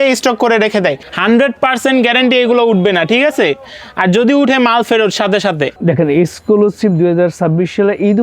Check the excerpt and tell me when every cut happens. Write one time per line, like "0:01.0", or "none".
0:01.0
0:05.7